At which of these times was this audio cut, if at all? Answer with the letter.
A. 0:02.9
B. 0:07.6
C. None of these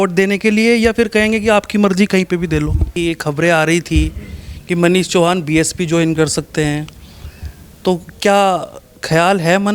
A